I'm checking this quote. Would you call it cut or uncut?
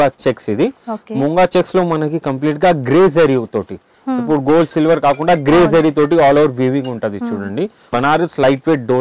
cut